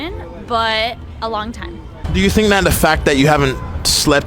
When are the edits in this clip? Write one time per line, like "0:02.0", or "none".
0:01.5